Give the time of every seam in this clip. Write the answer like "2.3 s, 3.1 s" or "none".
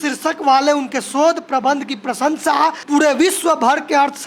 2.8 s